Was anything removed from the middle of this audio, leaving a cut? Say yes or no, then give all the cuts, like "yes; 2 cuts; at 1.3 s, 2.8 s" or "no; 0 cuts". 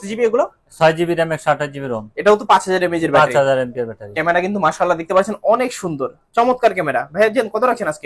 no; 0 cuts